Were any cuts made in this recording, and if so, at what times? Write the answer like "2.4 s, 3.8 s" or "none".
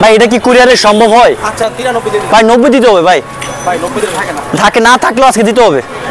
1.5 s